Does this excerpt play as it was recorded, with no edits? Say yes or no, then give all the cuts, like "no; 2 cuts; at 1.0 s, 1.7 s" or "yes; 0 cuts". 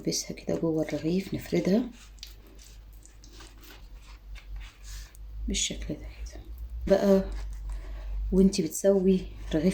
no; 2 cuts; at 3.5 s, 6.9 s